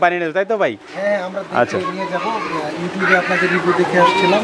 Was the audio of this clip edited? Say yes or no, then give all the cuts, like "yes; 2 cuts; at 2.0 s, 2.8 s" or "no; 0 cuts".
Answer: no; 0 cuts